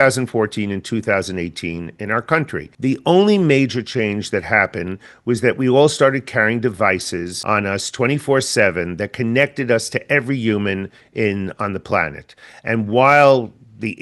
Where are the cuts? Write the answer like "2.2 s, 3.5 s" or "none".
2.6 s, 7.3 s